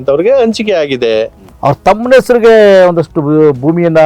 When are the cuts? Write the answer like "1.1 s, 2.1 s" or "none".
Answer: 1.4 s